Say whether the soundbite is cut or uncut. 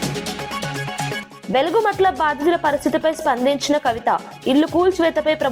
cut